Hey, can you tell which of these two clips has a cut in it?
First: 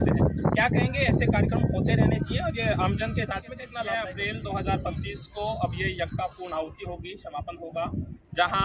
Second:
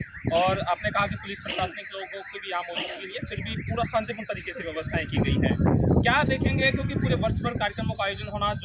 first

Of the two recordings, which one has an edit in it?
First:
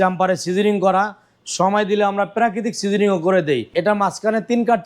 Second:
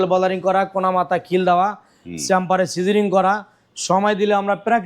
first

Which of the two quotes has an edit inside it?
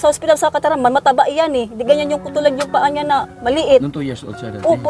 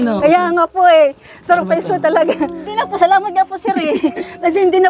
second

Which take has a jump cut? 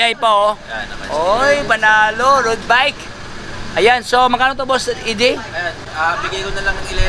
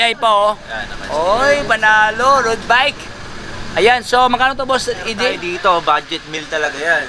second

